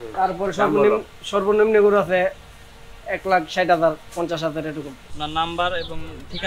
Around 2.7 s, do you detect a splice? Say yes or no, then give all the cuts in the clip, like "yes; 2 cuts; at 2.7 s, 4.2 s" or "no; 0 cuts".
no; 1 cut; at 5.1 s